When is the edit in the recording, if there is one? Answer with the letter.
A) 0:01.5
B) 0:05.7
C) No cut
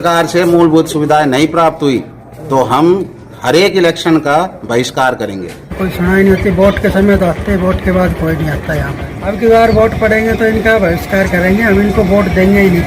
B